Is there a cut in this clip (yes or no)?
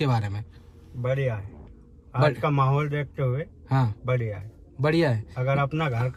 no